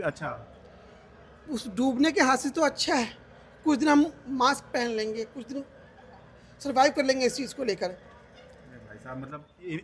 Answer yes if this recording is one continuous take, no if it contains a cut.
yes